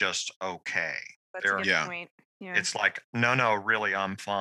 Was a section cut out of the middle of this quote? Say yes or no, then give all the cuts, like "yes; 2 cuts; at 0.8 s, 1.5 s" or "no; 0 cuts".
yes; 1 cut; at 1.3 s